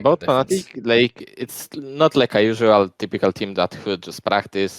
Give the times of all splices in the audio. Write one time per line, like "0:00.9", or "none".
none

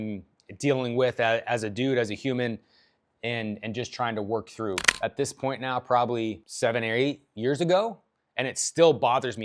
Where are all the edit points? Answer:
0:04.9
0:06.5

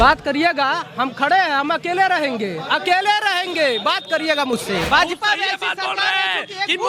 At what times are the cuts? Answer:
0:04.9

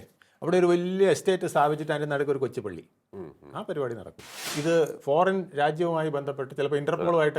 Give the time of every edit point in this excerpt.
0:04.5

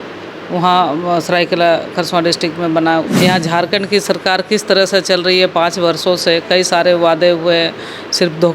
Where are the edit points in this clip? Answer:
0:03.1

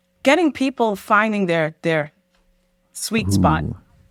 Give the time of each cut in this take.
none

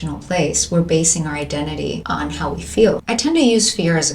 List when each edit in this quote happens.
0:02.0
0:03.0

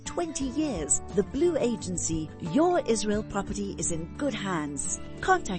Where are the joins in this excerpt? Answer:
none

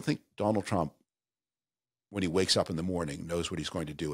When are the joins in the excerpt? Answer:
none

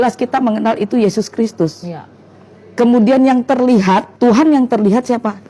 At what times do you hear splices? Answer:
0:04.1

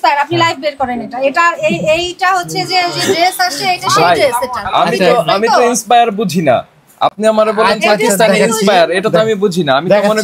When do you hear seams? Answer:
none

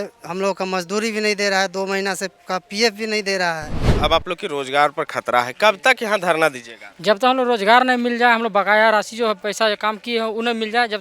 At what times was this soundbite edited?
0:03.9

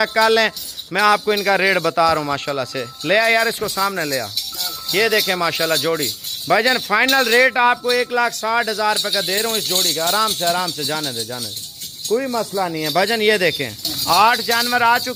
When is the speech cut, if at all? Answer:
none

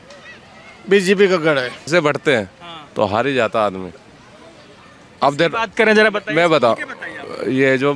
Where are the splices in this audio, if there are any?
0:01.9

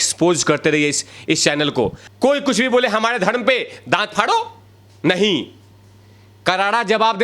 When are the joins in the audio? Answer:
0:02.0

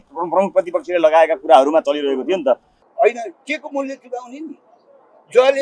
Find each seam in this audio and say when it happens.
0:02.8

